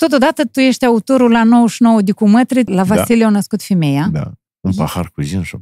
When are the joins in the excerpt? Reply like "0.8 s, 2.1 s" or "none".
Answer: 2.7 s, 4.4 s